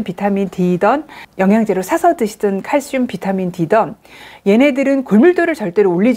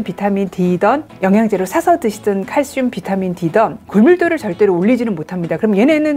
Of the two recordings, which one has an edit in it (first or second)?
second